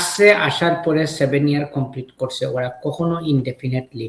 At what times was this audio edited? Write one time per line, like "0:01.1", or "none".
none